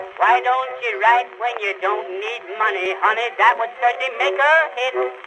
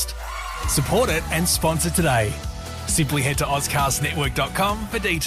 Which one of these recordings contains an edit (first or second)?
first